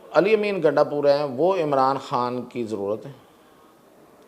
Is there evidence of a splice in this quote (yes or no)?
no